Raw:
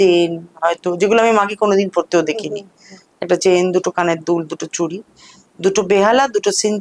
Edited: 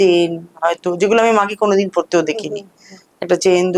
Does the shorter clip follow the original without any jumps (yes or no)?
yes